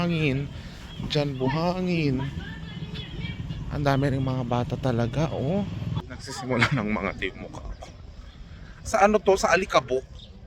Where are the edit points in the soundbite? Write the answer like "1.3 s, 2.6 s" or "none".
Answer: 6.0 s